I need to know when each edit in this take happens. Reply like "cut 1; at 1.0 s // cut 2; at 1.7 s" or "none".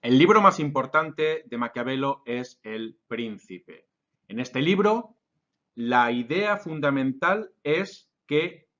cut 1; at 4.6 s